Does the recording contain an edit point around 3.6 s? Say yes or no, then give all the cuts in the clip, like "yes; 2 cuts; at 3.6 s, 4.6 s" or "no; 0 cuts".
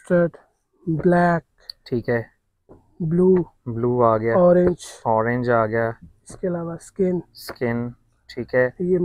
no; 0 cuts